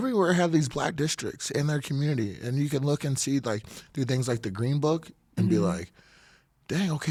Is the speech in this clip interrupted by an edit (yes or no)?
no